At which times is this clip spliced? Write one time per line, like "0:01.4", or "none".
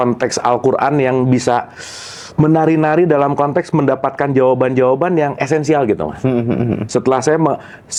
none